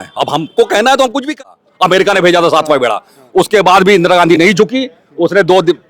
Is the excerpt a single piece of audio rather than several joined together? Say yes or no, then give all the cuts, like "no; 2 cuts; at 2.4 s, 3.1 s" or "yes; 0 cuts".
no; 1 cut; at 1.3 s